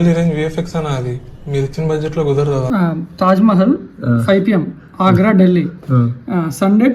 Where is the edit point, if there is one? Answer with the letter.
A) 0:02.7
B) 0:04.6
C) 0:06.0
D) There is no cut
A